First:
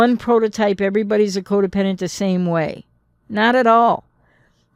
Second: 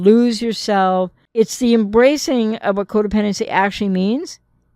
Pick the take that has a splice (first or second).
second